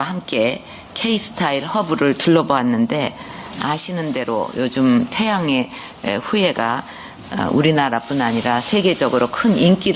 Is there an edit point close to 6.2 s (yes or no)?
yes